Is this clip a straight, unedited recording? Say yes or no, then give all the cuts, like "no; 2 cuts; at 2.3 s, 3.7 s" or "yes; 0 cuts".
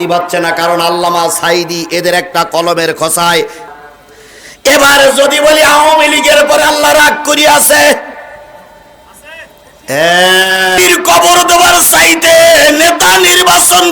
no; 2 cuts; at 3.7 s, 10.8 s